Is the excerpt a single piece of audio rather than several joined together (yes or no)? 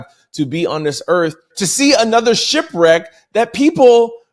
no